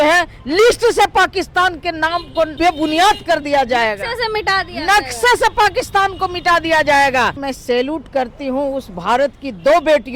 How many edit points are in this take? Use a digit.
2